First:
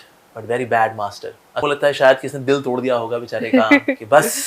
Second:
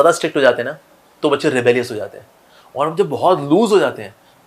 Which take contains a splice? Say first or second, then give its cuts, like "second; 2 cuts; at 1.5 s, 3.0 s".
first; 1 cut; at 1.7 s